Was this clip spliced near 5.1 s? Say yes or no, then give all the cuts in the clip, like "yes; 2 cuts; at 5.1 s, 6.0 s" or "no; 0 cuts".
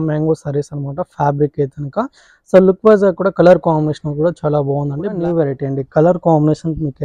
yes; 1 cut; at 5.1 s